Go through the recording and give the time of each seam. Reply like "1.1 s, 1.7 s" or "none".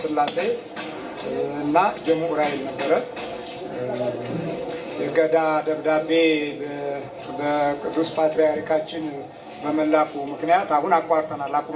none